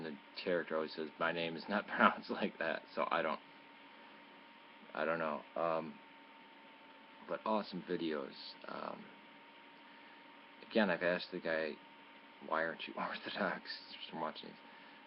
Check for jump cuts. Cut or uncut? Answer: uncut